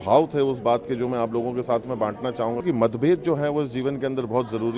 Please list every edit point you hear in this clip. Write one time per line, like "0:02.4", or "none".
0:02.6